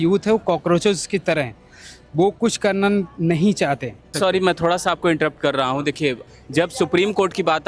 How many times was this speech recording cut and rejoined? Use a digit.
2